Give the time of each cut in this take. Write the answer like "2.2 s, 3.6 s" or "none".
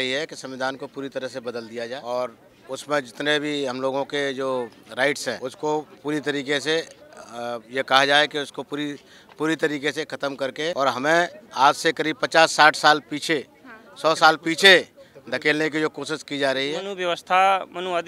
2.0 s, 5.5 s, 7.6 s, 10.7 s, 16.9 s